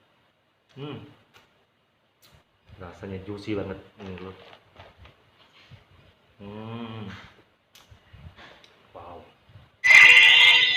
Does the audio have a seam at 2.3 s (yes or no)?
no